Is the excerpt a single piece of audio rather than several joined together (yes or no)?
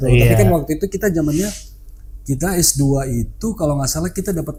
yes